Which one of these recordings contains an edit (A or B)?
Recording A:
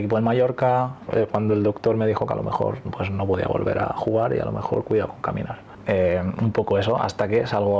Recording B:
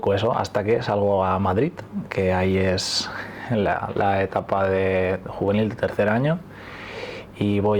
A